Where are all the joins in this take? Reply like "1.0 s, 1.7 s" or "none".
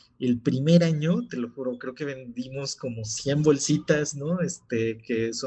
none